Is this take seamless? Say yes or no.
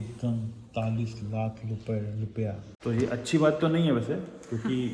no